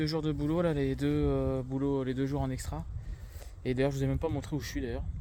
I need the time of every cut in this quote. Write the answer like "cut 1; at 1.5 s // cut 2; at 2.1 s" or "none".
none